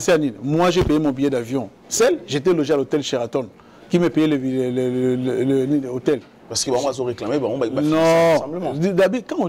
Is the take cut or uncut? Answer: uncut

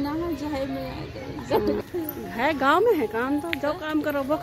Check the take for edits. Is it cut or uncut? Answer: cut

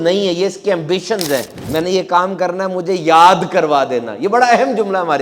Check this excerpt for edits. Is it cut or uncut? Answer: cut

